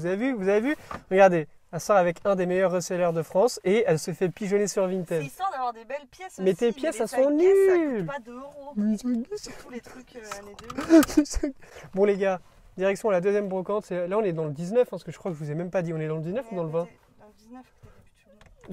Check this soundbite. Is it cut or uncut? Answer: uncut